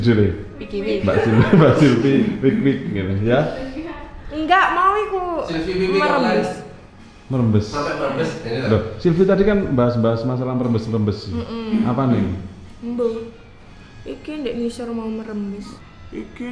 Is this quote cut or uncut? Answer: uncut